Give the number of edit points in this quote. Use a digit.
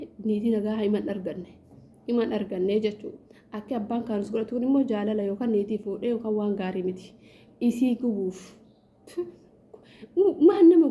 0